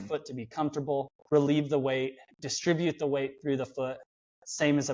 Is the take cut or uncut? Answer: cut